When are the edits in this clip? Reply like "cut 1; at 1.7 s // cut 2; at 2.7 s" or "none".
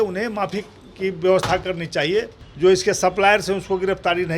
cut 1; at 2.4 s